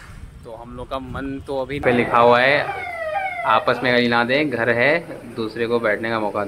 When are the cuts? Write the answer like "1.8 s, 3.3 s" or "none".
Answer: 1.8 s